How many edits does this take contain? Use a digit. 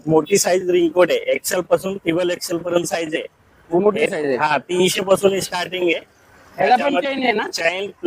0